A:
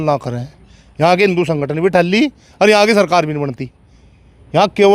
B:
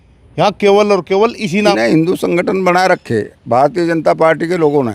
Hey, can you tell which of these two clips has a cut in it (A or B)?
B